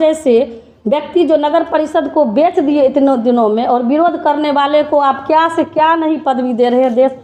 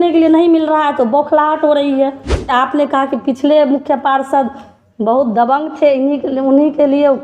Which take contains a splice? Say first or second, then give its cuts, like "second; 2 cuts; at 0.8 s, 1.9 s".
second; 1 cut; at 2.5 s